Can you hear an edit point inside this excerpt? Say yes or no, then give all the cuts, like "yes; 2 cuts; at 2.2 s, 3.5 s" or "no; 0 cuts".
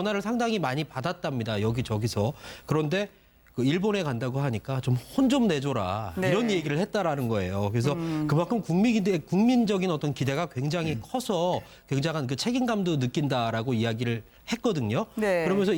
no; 0 cuts